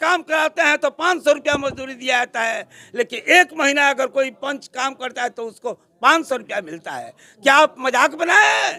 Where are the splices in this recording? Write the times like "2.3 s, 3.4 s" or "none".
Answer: none